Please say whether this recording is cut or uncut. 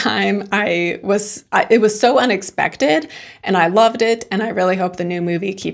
uncut